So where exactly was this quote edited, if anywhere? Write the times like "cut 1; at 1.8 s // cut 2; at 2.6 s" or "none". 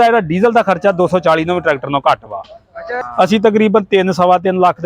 cut 1; at 2.9 s

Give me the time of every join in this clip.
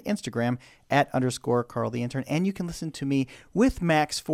none

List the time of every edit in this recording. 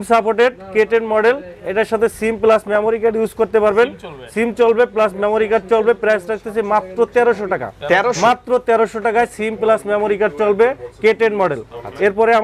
none

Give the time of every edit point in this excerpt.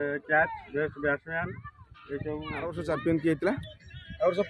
cut 1; at 2.8 s

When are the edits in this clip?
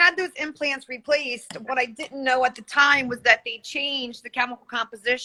none

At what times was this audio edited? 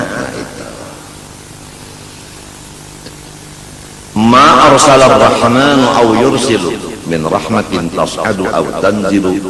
none

